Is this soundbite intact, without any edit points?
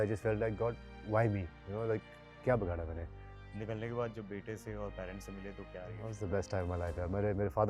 no; 1 cut; at 3.5 s

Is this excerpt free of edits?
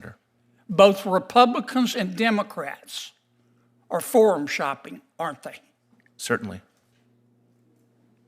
yes; 0 cuts

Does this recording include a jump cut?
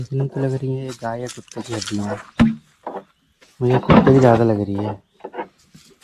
no; 0 cuts

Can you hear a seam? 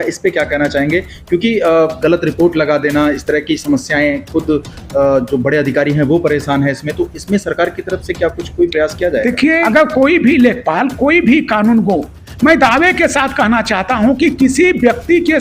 yes; 1 cut; at 9.6 s

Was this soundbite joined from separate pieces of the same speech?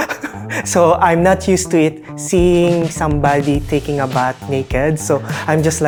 no; 0 cuts

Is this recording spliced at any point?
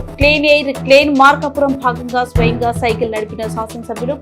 no; 0 cuts

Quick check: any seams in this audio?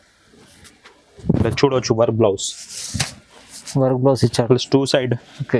no; 0 cuts

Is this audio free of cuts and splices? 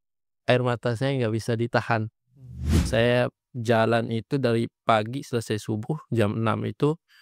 no; 1 cut; at 2.8 s

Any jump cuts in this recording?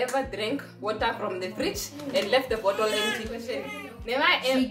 yes; 1 cut; at 3.7 s

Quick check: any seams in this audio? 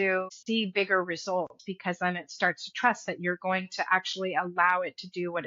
no; 0 cuts

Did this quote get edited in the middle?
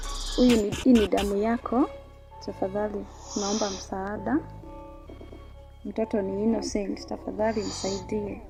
no; 0 cuts

